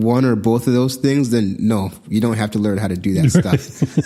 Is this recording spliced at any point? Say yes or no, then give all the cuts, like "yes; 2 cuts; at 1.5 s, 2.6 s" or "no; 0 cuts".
no; 0 cuts